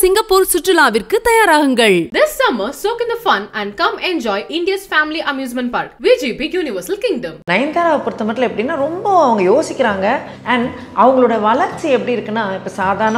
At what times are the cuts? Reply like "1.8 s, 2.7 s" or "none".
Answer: 7.3 s, 10.3 s